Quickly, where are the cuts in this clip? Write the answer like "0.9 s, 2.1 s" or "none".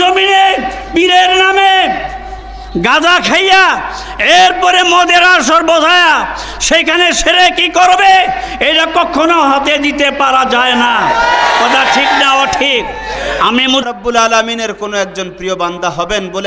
13.8 s